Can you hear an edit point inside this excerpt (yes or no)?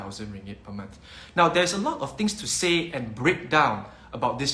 no